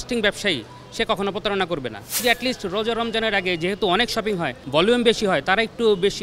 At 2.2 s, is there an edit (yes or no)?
yes